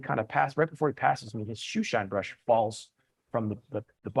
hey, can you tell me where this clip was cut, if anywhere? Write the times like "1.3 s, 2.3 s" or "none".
none